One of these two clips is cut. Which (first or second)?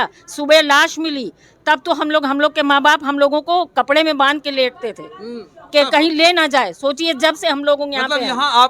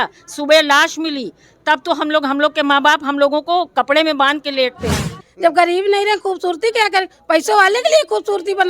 second